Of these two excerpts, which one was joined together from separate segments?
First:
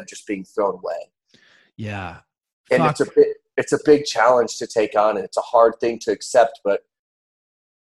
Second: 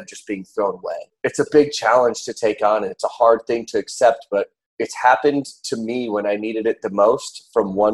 second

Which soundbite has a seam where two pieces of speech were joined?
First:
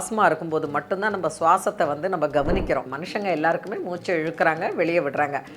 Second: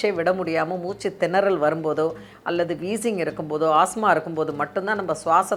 first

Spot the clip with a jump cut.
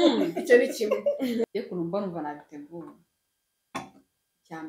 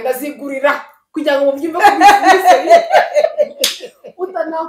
first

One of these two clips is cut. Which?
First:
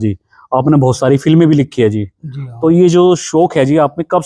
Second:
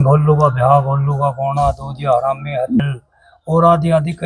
second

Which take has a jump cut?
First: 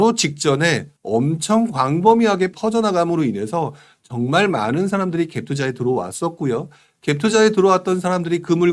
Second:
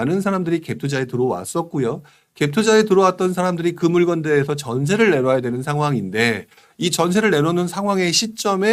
first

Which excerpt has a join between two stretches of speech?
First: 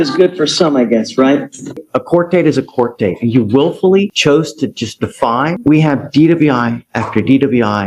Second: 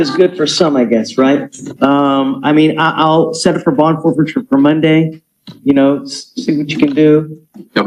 first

